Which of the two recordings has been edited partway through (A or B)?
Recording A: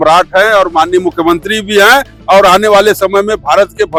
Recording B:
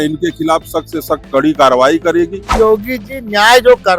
B